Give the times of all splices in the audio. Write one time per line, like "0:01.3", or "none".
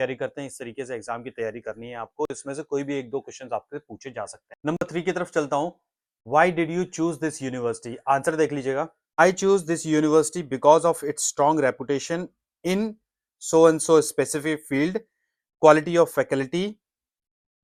none